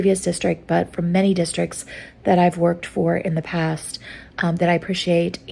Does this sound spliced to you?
no; 0 cuts

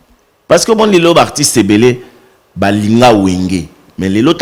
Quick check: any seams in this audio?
no; 0 cuts

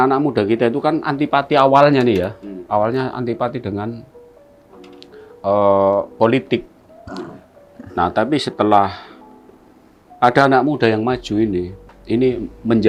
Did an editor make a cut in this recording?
no; 0 cuts

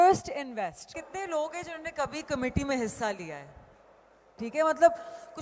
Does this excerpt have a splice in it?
yes; 2 cuts; at 1.3 s, 4.3 s

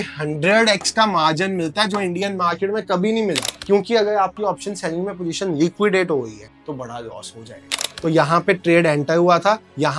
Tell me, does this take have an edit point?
yes; 2 cuts; at 3.5 s, 7.9 s

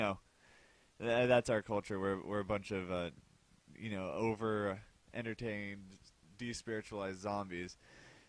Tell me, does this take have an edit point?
yes; 1 cut; at 1.1 s

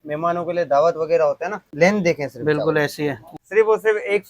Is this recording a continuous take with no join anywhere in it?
no; 2 cuts; at 1.6 s, 3.3 s

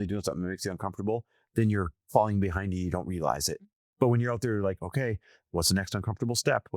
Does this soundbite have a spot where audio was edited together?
yes; 1 cut; at 3.7 s

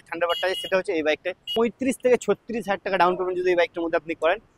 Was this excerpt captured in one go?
no; 1 cut; at 1.4 s

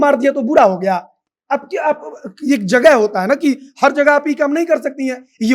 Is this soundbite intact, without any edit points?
yes; 0 cuts

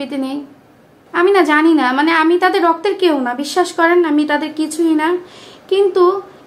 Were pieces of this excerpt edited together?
yes; 1 cut; at 0.9 s

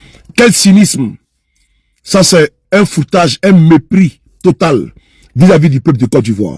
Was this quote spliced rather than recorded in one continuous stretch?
no; 0 cuts

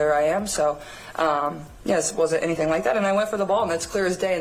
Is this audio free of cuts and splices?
yes; 0 cuts

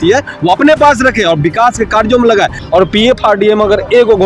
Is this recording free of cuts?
no; 1 cut; at 2.6 s

